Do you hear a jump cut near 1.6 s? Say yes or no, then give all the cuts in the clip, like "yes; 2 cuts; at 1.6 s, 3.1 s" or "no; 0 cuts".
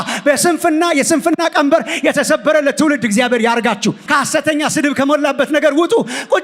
no; 1 cut; at 4.0 s